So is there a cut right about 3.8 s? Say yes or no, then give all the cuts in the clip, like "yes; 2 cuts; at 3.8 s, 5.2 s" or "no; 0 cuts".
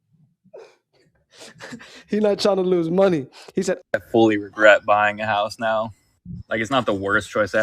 yes; 1 cut; at 3.8 s